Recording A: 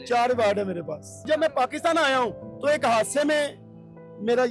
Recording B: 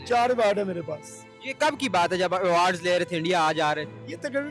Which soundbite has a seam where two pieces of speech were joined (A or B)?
A